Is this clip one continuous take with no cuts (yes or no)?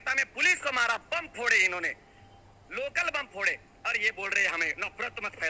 yes